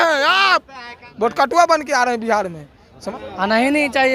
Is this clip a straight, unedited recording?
no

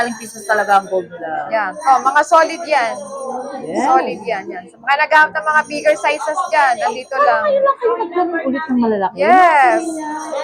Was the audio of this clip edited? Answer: no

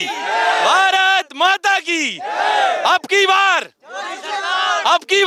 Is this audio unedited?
yes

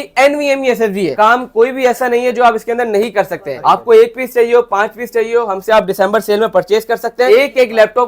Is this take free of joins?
no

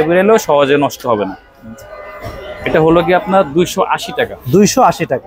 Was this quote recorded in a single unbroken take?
yes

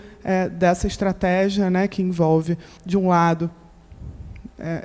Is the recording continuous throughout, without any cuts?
no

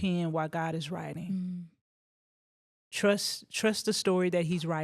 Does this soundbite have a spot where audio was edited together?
no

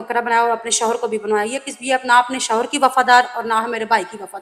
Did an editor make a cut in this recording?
no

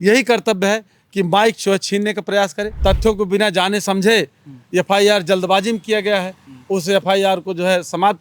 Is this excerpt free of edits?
no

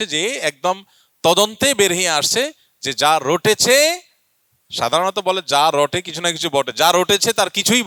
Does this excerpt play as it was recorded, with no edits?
yes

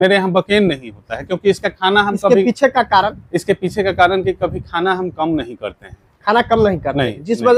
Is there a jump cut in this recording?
no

